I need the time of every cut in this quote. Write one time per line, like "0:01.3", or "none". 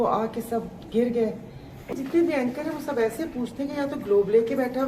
0:01.9